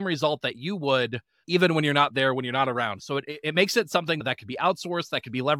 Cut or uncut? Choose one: uncut